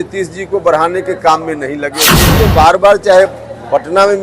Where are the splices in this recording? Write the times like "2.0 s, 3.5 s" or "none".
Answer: 2.3 s